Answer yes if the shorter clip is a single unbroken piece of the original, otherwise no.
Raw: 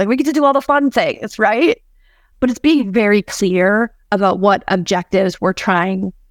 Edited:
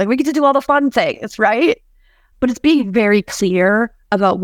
yes